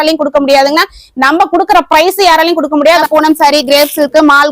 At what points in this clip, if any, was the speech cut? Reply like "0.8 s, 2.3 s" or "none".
3.0 s